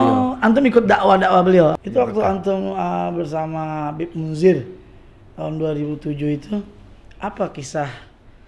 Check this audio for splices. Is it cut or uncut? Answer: cut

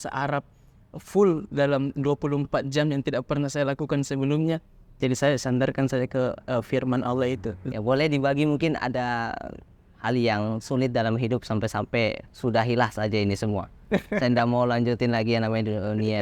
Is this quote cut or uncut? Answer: cut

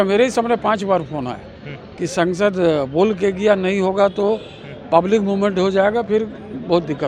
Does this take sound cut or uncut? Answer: uncut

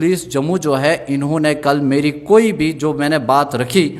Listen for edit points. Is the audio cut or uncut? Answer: uncut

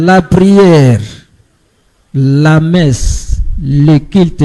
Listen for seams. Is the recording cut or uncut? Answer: uncut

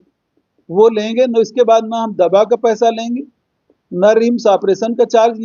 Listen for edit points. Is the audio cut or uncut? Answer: uncut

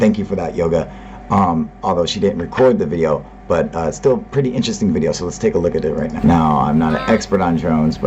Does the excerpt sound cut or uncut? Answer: uncut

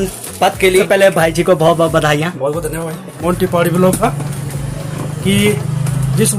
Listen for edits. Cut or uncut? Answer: cut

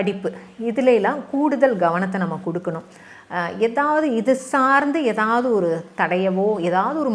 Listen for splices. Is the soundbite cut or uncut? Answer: uncut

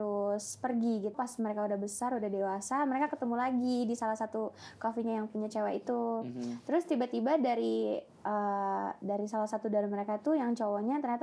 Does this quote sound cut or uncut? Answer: cut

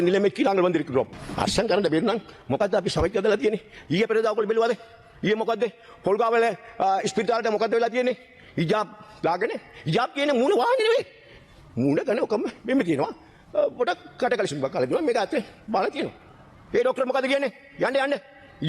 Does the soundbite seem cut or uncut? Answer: cut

